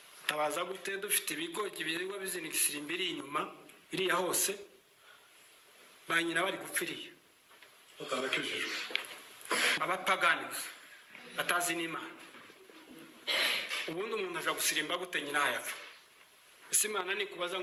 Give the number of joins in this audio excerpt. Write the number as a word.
zero